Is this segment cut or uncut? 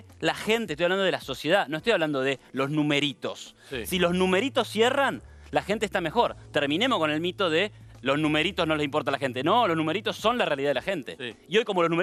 uncut